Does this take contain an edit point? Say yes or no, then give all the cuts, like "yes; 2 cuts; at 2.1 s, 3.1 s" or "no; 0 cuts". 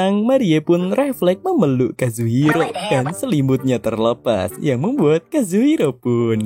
no; 0 cuts